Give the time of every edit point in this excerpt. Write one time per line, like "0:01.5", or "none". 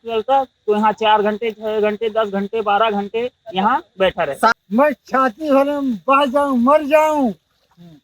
0:04.5